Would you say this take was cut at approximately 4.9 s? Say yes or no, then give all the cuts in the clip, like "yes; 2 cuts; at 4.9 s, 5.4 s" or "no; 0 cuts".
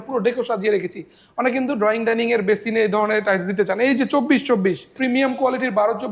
yes; 1 cut; at 4.9 s